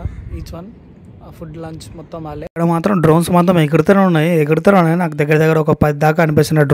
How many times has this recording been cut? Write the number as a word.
one